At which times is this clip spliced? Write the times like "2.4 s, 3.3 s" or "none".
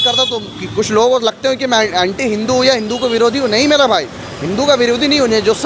none

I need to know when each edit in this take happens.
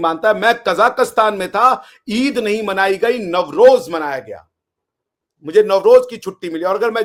none

